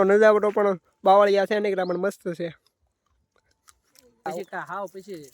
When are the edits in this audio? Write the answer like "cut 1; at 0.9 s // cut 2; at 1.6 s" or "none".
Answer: cut 1; at 4.3 s